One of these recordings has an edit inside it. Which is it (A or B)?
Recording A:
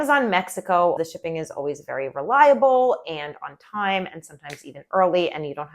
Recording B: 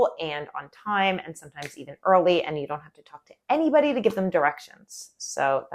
A